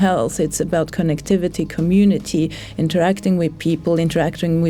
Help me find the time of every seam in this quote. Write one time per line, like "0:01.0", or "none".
none